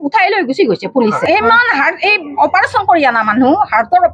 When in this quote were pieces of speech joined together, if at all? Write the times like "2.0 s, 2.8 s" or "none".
1.2 s